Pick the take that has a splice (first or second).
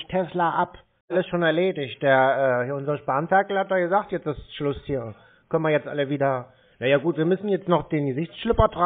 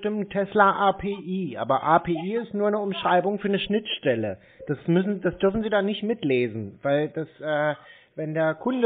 first